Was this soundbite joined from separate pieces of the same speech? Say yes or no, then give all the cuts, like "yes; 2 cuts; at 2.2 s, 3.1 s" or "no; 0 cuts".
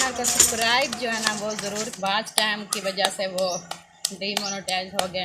yes; 1 cut; at 1.9 s